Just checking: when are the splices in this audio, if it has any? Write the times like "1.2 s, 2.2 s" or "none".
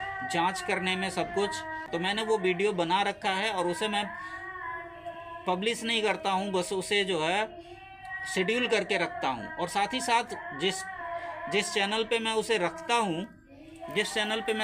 2.0 s